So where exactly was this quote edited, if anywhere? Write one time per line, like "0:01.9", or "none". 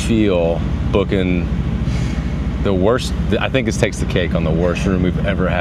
none